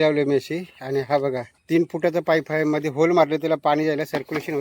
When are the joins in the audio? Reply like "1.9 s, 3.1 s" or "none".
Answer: 1.5 s